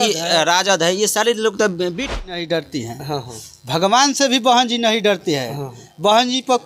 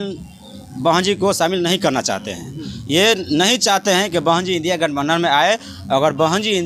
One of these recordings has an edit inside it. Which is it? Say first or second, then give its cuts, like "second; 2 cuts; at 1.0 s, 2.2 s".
first; 1 cut; at 2.1 s